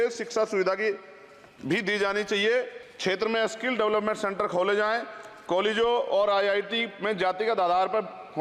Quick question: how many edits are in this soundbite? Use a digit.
1